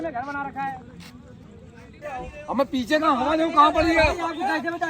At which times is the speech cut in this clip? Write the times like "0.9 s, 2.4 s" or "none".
2.0 s